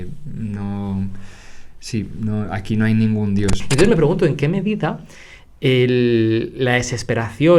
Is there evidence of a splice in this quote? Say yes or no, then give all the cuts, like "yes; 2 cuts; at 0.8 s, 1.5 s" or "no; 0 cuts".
yes; 1 cut; at 3.6 s